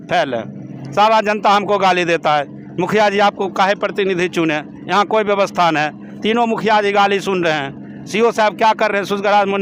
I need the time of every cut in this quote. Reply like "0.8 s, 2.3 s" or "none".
none